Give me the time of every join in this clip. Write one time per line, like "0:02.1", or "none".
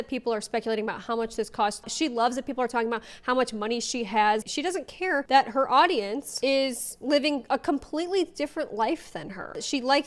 none